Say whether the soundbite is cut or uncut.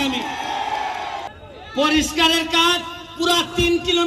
cut